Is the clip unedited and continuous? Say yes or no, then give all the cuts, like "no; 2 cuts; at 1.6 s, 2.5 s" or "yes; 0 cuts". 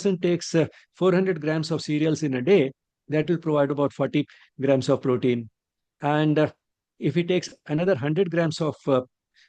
yes; 0 cuts